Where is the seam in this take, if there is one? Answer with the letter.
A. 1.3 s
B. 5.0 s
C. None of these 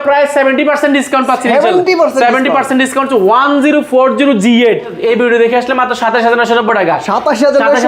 B